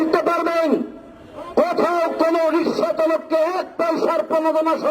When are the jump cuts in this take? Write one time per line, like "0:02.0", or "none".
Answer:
none